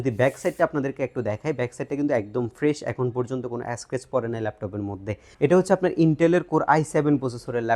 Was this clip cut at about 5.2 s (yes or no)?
yes